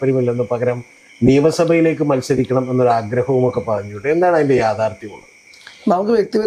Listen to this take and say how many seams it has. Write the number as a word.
zero